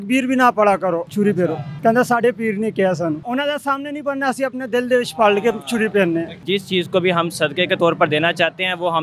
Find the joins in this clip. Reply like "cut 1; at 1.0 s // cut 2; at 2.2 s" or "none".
cut 1; at 1.2 s // cut 2; at 3.2 s // cut 3; at 6.4 s